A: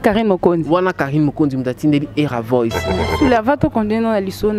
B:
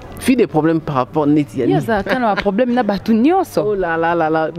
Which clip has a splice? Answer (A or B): A